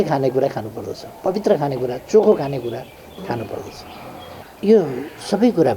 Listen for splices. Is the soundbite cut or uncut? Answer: cut